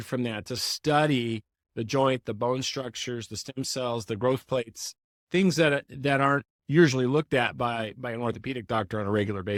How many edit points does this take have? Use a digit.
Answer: 0